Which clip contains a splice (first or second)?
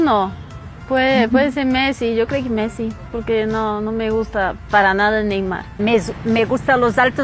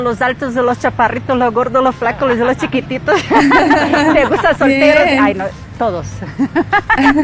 first